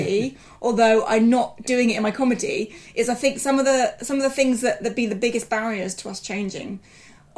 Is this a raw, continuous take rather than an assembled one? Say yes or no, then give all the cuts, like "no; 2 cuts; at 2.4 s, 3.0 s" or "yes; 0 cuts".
yes; 0 cuts